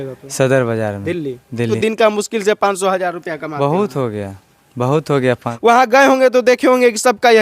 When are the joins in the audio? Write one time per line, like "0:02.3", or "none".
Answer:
0:01.8
0:05.5